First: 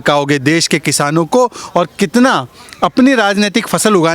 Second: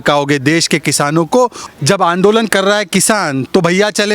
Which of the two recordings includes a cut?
second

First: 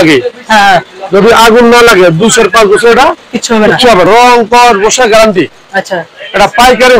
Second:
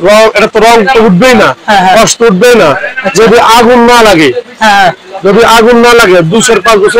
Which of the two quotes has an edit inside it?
first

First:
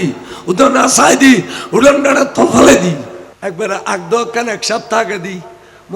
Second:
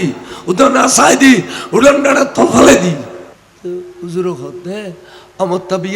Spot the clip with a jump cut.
first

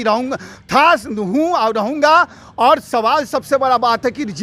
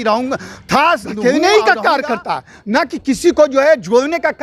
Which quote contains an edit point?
second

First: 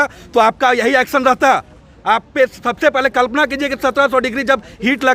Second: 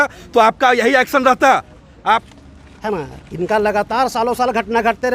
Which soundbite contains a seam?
second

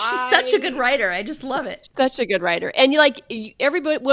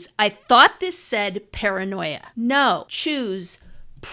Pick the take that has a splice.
second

